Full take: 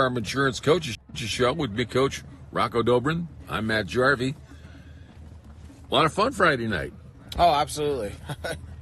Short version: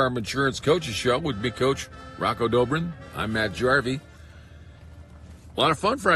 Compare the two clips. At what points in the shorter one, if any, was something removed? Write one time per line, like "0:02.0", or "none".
0:00.9